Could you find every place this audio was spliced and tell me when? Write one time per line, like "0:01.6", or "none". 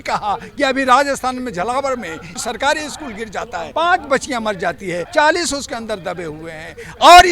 0:02.4
0:03.7
0:05.0